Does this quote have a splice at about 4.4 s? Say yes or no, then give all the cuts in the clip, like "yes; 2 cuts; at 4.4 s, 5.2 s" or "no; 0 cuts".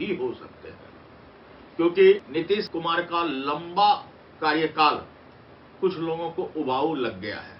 no; 1 cut; at 2.6 s